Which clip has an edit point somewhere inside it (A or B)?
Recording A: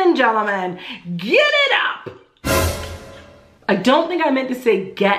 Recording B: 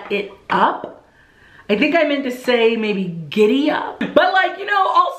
B